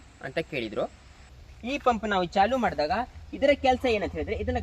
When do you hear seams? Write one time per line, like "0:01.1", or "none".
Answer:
0:01.4